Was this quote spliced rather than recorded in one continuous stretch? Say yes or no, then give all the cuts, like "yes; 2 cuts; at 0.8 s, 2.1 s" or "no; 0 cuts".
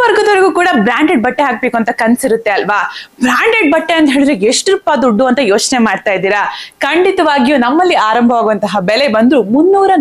no; 0 cuts